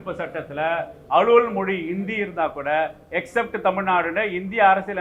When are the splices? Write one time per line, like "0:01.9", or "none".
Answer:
none